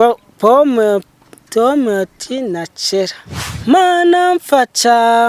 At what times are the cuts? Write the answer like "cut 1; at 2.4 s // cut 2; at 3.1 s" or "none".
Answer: cut 1; at 3.5 s